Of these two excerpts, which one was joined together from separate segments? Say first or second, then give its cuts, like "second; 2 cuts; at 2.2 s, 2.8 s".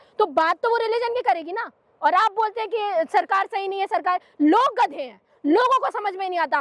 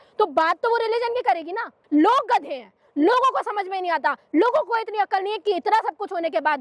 second; 1 cut; at 1.8 s